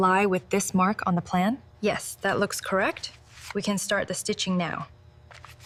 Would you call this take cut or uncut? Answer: uncut